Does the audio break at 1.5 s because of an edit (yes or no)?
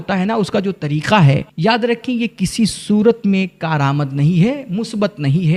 yes